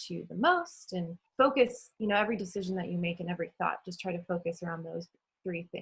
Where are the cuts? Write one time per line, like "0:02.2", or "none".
0:01.2
0:01.9